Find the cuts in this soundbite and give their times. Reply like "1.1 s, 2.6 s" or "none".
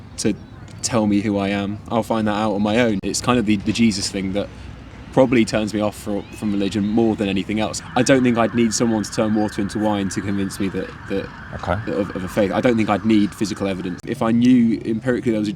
3.1 s, 7.8 s, 14.0 s